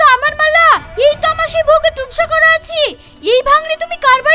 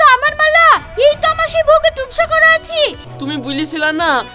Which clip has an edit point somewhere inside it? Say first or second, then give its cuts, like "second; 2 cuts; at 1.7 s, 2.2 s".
second; 1 cut; at 3.1 s